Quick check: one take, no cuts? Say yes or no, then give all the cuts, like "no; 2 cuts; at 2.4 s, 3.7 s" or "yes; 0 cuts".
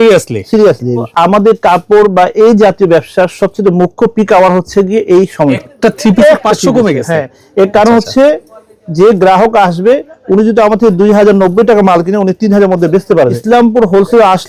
no; 3 cuts; at 1.1 s, 5.6 s, 13.4 s